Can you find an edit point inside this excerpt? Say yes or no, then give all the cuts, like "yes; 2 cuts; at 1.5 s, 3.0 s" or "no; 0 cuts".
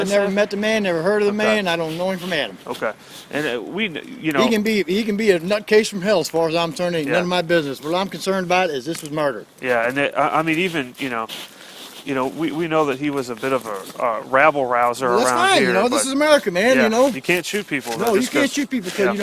no; 0 cuts